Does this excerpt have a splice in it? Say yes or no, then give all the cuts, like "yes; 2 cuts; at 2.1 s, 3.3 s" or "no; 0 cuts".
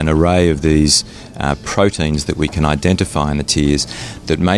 no; 0 cuts